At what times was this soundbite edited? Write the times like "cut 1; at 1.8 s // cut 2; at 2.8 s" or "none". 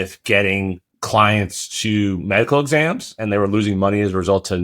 cut 1; at 0.9 s